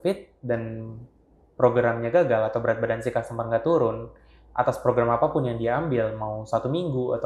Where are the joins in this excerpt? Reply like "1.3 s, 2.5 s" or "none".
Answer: none